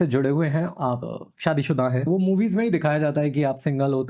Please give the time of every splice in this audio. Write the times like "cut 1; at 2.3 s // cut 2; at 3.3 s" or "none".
cut 1; at 1.0 s // cut 2; at 2.1 s